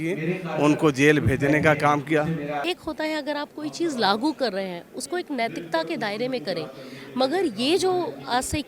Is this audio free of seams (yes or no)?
no